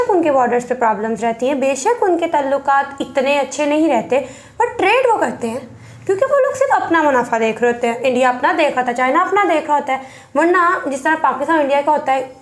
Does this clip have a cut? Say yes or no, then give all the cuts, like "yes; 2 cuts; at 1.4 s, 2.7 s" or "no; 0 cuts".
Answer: no; 0 cuts